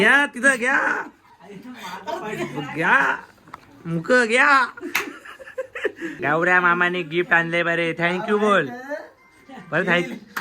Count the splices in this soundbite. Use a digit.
1